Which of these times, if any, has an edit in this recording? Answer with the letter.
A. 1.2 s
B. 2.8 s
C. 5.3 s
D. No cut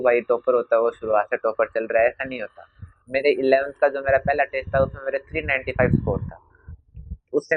D